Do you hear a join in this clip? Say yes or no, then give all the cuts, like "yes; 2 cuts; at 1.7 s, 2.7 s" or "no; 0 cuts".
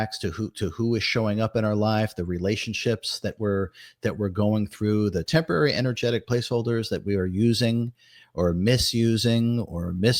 no; 0 cuts